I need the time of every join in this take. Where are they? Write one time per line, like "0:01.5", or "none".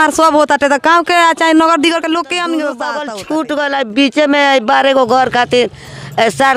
0:03.1